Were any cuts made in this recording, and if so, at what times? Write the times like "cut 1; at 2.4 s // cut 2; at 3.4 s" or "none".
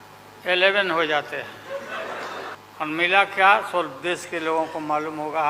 cut 1; at 2.6 s